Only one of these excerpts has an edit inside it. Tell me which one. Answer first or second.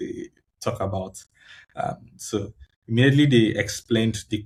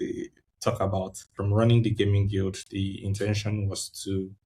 second